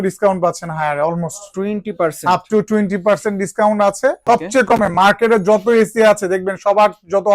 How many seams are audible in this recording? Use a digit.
1